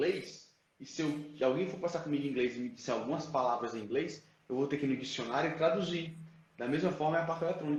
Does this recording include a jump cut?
no; 0 cuts

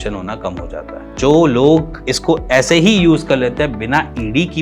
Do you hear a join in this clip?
yes; 1 cut; at 1.2 s

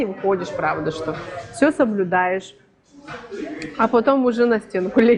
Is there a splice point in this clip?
no; 0 cuts

